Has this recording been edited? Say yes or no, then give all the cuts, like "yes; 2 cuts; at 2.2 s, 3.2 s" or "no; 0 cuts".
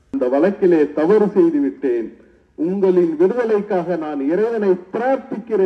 no; 0 cuts